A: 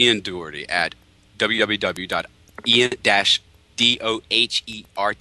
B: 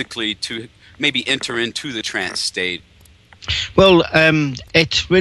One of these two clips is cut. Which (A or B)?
B